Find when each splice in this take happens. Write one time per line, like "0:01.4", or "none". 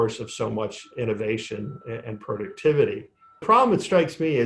0:03.4